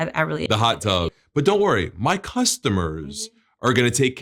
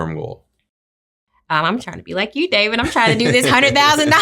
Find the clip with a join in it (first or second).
first